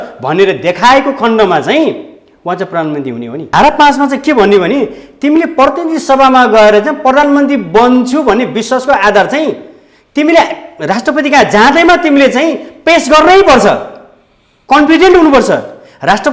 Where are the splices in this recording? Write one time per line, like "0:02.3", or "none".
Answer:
0:03.5

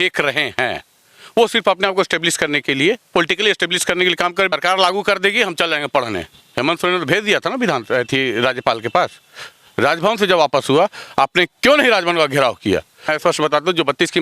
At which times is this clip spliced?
0:04.5
0:13.2

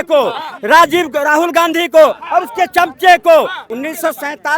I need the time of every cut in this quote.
0:03.6

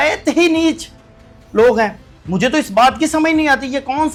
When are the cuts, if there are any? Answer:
none

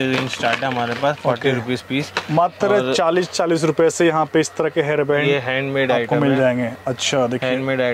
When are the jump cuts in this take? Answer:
none

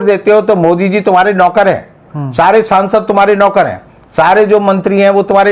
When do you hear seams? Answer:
none

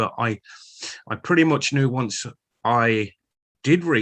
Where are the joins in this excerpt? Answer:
none

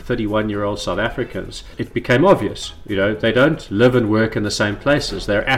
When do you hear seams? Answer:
0:01.8

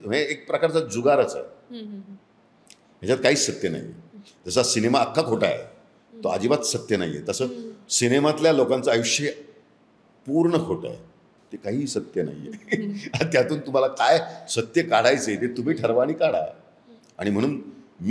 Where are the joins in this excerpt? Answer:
none

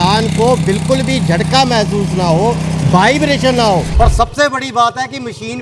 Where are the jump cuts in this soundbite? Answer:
0:03.9

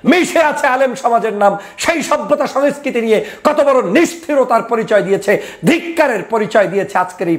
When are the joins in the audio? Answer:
none

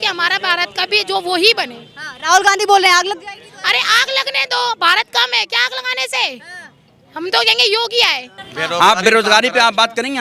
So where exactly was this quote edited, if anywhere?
0:08.4

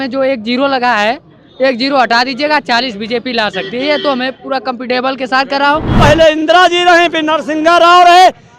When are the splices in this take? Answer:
0:05.9

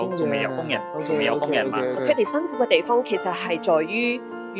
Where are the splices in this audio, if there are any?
0:02.0

